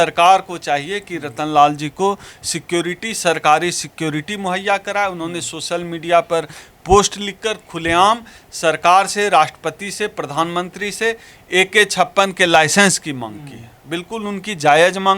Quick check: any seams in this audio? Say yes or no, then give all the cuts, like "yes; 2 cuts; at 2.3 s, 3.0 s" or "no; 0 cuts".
no; 0 cuts